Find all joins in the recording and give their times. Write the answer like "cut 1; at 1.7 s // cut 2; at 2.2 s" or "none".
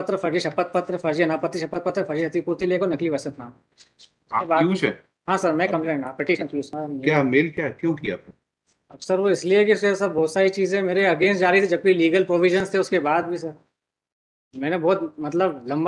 cut 1; at 6.8 s